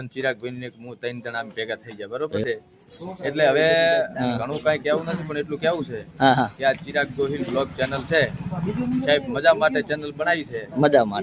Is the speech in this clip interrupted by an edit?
no; 0 cuts

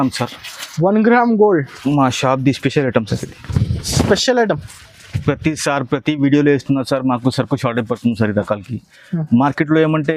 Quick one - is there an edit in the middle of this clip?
no; 0 cuts

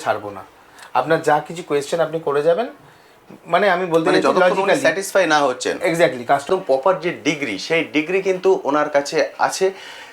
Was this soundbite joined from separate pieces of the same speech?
yes; 1 cut; at 6.4 s

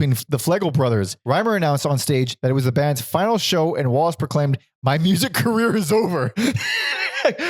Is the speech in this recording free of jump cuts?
no; 2 cuts; at 1.1 s, 2.3 s

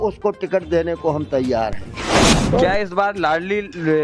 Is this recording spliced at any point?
yes; 1 cut; at 2.2 s

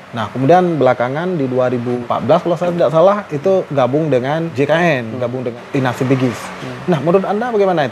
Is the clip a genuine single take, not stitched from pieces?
no; 3 cuts; at 2.0 s, 4.5 s, 5.6 s

